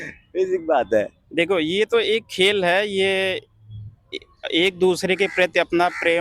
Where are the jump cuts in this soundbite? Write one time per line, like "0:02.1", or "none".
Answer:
0:01.2